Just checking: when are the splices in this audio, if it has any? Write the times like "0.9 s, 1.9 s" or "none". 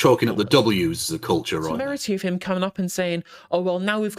1.8 s